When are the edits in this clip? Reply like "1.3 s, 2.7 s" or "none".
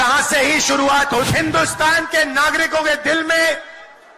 1.3 s